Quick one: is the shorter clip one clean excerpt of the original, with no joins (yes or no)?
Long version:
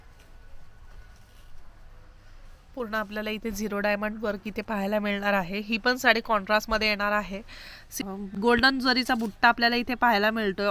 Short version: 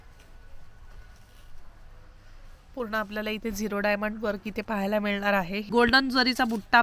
no